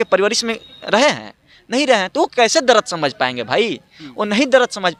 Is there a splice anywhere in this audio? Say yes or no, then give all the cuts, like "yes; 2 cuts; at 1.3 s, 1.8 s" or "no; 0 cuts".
no; 0 cuts